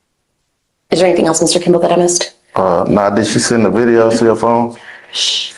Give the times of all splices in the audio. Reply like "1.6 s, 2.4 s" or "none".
1.3 s